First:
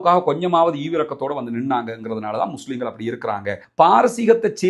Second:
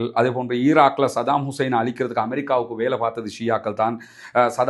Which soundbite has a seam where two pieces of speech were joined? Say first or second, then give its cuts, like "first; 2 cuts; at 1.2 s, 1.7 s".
first; 1 cut; at 3.6 s